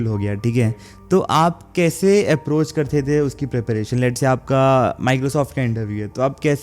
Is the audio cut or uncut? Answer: uncut